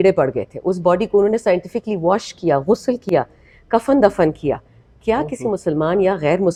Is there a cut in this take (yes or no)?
no